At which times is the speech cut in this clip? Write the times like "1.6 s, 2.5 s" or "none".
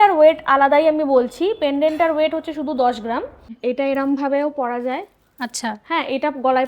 3.6 s